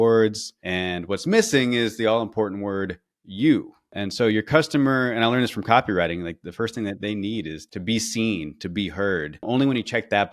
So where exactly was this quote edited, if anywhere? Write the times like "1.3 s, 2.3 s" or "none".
3.9 s, 6.4 s, 7.6 s, 9.5 s